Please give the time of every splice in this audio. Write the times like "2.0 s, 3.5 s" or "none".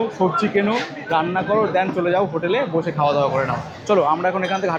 none